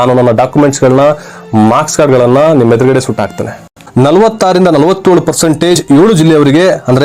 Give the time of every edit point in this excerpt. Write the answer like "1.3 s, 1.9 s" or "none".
3.8 s